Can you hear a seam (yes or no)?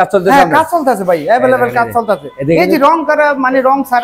no